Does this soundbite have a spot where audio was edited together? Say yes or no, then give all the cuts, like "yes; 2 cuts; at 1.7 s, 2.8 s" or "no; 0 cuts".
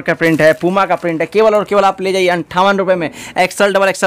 no; 0 cuts